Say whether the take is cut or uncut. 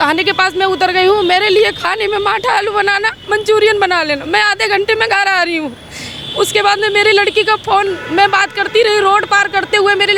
uncut